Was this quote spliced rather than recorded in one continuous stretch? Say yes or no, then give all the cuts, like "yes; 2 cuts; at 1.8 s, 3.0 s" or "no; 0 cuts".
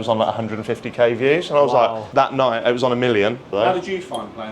yes; 2 cuts; at 2.0 s, 3.5 s